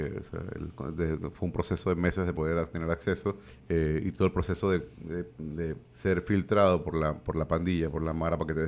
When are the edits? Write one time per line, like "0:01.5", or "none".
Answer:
0:03.5
0:05.4